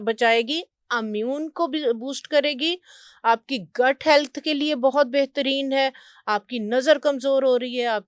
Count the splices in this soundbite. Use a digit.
0